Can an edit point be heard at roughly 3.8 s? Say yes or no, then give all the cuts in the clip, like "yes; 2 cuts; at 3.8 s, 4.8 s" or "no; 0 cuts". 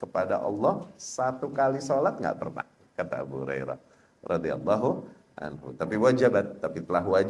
no; 0 cuts